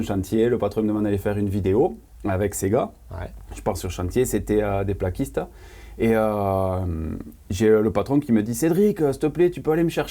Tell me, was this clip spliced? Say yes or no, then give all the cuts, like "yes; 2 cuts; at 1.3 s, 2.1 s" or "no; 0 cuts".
no; 0 cuts